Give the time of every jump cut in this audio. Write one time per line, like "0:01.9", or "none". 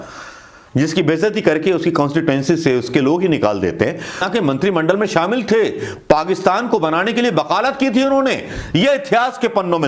0:04.3